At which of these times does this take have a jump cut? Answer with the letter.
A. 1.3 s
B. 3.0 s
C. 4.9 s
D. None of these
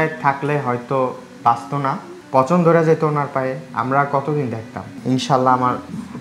C